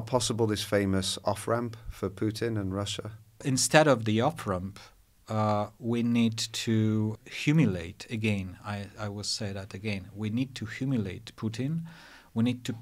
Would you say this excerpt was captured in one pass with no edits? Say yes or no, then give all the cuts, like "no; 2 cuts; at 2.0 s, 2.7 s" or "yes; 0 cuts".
no; 2 cuts; at 3.5 s, 7.2 s